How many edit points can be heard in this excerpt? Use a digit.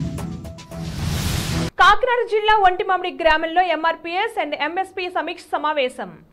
1